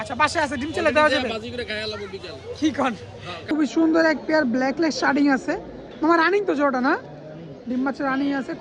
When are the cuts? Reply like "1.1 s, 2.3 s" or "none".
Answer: 3.5 s